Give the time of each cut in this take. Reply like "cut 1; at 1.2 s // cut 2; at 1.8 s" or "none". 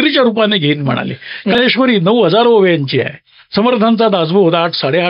cut 1; at 1.6 s